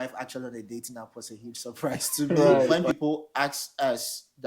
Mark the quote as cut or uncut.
cut